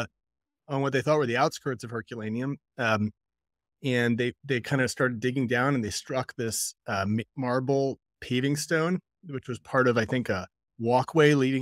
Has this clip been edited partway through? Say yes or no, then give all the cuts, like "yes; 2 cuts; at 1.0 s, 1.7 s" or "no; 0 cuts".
no; 0 cuts